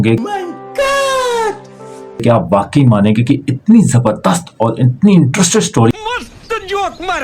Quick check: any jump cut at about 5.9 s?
yes; 1 cut; at 5.9 s

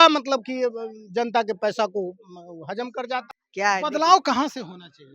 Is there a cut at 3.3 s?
yes; 1 cut; at 3.3 s

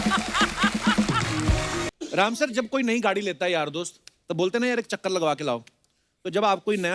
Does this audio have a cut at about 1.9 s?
yes; 1 cut; at 1.9 s

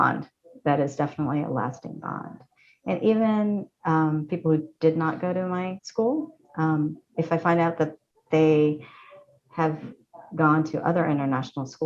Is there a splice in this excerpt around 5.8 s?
yes; 1 cut; at 5.8 s

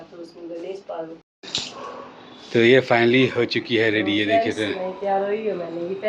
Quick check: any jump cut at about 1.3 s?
yes; 1 cut; at 1.3 s

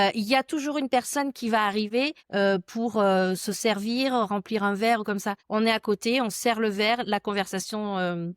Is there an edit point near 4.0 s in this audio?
no; 2 cuts; at 2.2 s, 5.4 s

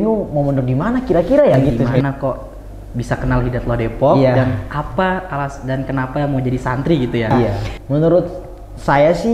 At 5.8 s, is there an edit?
no; 2 cuts; at 1.9 s, 7.7 s

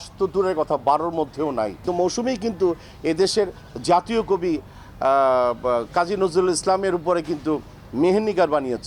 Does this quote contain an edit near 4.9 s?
no; 1 cut; at 1.8 s

